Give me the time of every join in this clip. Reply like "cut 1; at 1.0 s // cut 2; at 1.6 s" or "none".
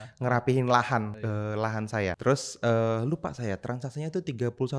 cut 1; at 1.1 s // cut 2; at 2.2 s